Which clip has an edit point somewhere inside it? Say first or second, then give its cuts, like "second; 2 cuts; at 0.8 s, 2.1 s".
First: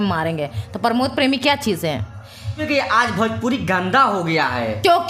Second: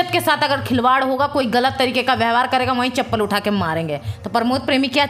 first; 1 cut; at 2.6 s